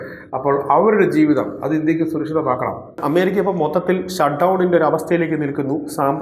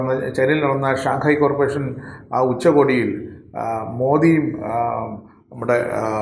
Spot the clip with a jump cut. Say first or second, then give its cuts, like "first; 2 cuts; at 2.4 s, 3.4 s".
first; 1 cut; at 3.0 s